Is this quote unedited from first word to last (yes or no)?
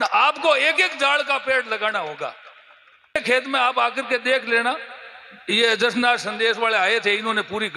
no